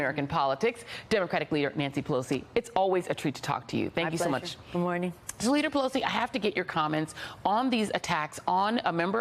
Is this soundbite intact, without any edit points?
no; 1 cut; at 6.3 s

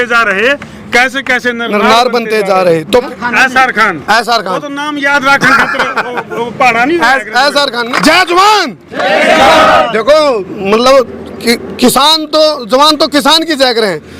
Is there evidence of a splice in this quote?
yes; 2 cuts; at 3.1 s, 7.9 s

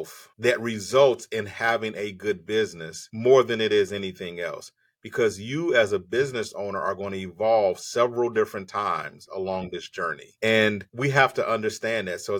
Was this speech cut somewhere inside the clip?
no; 0 cuts

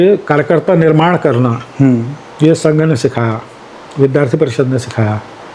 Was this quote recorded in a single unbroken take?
yes; 0 cuts

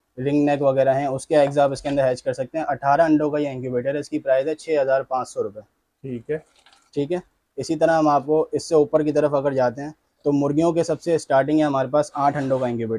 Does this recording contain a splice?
no; 0 cuts

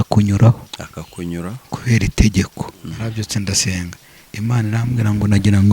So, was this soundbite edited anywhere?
yes; 1 cut; at 2.5 s

